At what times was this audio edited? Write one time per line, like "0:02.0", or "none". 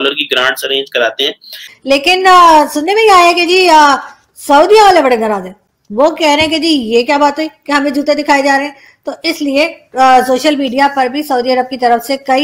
0:01.8